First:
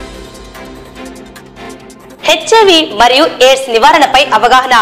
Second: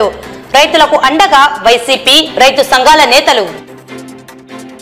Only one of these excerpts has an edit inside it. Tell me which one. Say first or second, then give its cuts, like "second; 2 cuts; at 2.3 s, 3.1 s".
first; 1 cut; at 2.1 s